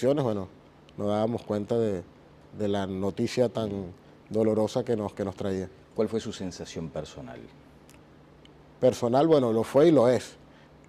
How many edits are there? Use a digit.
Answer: 0